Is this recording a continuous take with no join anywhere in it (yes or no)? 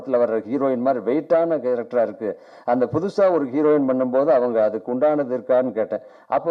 yes